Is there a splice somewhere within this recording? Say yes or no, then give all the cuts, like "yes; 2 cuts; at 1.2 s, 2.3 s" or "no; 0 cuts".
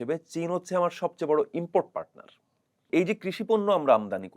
yes; 1 cut; at 2.9 s